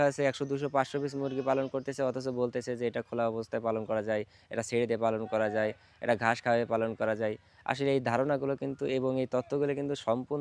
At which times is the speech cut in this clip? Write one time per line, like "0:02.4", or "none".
none